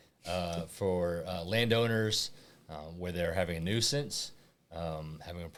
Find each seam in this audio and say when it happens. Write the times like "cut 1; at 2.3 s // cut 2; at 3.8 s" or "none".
none